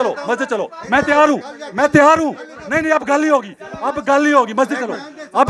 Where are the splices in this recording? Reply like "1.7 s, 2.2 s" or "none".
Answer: none